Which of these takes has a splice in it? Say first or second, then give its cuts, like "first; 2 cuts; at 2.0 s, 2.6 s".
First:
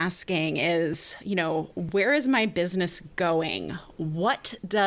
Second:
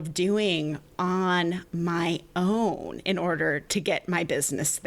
second; 1 cut; at 3.6 s